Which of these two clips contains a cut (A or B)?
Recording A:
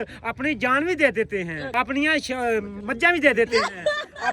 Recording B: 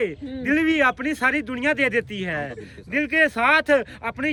A